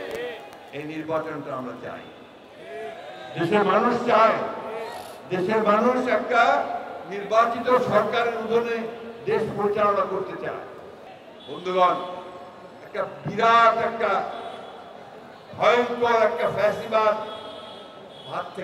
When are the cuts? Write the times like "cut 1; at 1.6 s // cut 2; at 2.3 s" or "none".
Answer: none